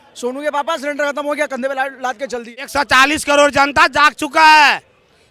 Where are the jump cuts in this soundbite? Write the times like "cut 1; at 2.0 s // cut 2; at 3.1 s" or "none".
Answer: cut 1; at 2.7 s